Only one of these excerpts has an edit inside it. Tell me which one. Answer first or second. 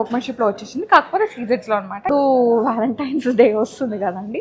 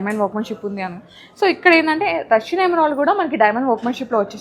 first